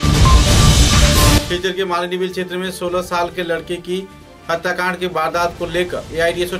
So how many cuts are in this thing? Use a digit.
0